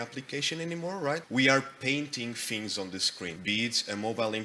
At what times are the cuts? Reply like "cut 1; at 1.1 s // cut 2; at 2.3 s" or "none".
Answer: cut 1; at 1.2 s // cut 2; at 3.4 s